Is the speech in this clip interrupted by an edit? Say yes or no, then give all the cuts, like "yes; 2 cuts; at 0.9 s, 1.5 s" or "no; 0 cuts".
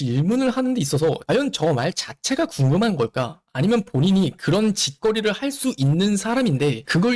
no; 0 cuts